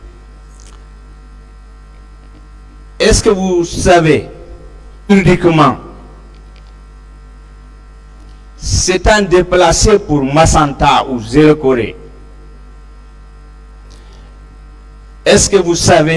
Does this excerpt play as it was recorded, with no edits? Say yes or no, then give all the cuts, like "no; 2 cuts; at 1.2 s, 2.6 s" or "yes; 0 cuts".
yes; 0 cuts